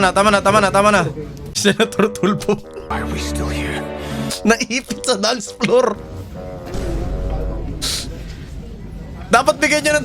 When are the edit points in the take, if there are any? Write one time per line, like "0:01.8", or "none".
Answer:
none